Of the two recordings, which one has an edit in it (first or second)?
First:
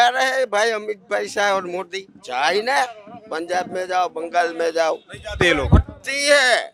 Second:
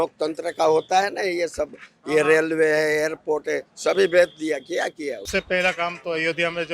second